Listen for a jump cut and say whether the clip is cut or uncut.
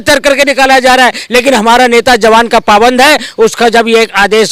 uncut